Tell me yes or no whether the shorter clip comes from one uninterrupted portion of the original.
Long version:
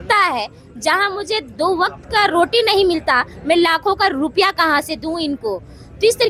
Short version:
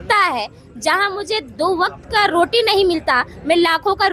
yes